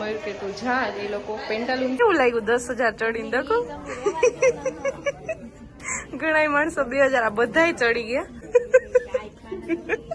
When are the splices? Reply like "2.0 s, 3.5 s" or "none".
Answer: 2.0 s, 8.4 s